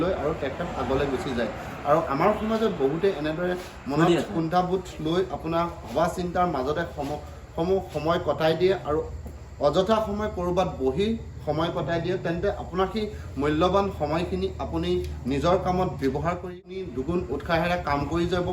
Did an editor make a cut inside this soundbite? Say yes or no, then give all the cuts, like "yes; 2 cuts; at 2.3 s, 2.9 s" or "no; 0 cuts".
yes; 1 cut; at 16.7 s